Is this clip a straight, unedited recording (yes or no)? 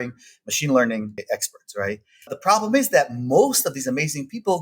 no